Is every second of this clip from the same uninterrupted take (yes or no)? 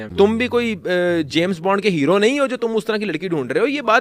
yes